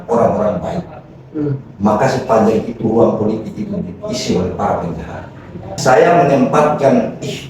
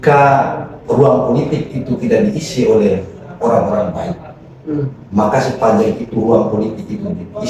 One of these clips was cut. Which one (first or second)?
first